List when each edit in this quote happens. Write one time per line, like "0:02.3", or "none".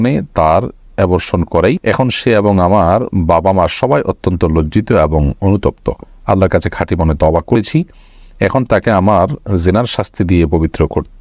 0:01.8
0:07.6